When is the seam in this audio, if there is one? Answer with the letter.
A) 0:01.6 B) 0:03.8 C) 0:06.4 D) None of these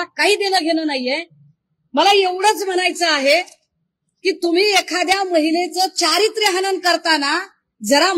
D